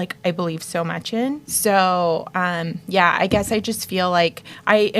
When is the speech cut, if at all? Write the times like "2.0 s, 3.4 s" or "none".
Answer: 1.5 s